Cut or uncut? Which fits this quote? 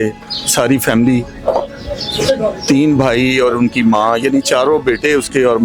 uncut